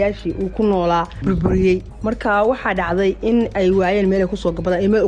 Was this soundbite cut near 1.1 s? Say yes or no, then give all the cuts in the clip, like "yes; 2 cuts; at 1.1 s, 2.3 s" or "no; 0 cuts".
yes; 1 cut; at 1.1 s